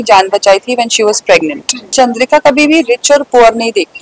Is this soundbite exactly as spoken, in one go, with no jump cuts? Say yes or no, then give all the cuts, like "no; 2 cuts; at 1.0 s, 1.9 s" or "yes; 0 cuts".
no; 1 cut; at 1.9 s